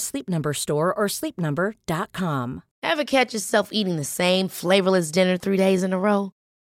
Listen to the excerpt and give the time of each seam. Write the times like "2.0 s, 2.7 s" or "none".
2.7 s